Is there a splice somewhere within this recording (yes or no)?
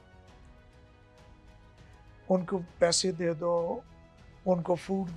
yes